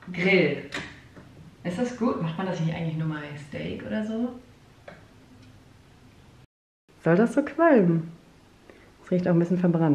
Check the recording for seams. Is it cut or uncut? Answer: cut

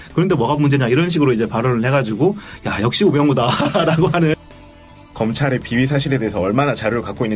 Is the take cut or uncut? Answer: cut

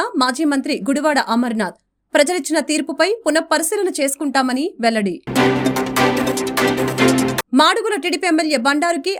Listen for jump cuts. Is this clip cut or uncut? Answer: uncut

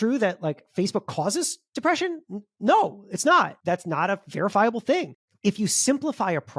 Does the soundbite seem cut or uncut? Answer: cut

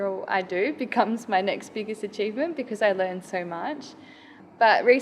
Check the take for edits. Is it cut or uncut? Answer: uncut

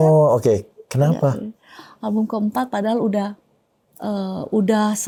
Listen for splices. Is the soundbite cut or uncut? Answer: uncut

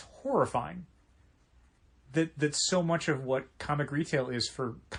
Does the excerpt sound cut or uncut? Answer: uncut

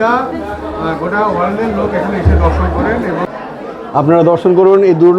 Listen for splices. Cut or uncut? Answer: cut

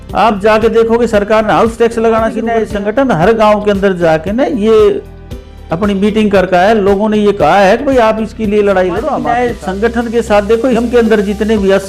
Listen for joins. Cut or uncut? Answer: cut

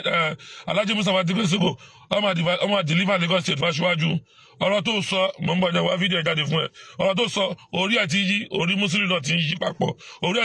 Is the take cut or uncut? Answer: uncut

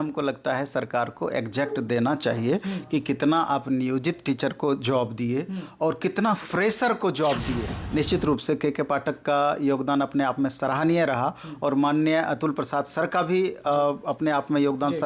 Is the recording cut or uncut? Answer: cut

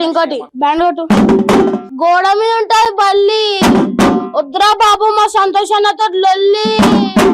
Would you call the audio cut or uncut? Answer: cut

